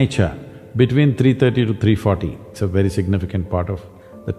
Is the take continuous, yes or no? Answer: no